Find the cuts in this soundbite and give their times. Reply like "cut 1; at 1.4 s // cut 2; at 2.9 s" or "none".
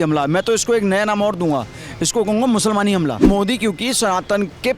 cut 1; at 3.3 s

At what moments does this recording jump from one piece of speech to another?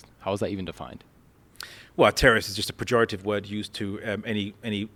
none

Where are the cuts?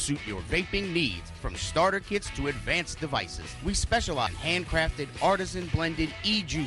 cut 1; at 4.1 s

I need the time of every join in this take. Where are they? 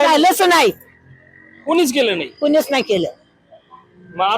none

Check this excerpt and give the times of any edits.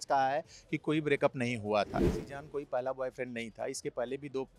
cut 1; at 2.1 s

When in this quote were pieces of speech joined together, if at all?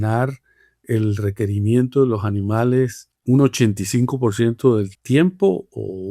cut 1; at 3.1 s // cut 2; at 5.0 s

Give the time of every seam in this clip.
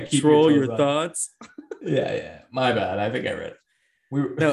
none

